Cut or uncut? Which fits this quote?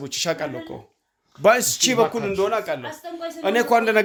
uncut